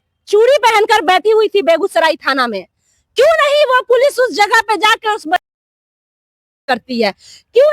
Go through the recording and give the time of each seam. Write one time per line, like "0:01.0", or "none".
none